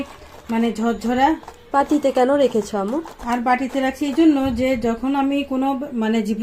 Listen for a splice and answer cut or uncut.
uncut